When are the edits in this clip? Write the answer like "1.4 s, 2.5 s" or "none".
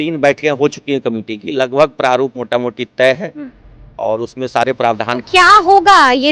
none